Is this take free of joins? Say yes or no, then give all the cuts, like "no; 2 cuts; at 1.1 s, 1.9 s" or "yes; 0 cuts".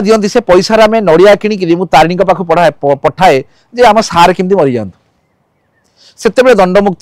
yes; 0 cuts